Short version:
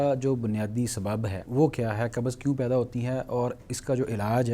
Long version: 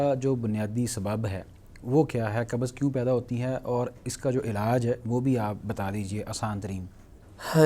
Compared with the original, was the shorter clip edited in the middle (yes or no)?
yes